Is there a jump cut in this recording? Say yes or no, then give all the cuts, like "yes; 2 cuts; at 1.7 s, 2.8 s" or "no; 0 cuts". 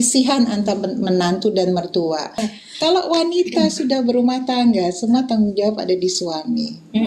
yes; 1 cut; at 2.5 s